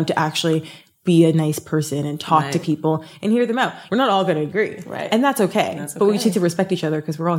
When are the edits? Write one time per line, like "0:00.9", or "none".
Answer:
0:03.8